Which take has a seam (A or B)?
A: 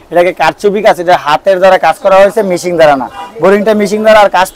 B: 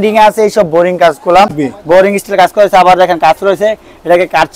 B